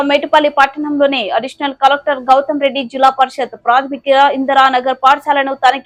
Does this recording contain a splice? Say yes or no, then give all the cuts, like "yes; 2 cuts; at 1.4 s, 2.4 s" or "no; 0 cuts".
no; 0 cuts